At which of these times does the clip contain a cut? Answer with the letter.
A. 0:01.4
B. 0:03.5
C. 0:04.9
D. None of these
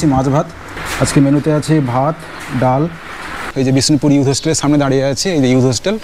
B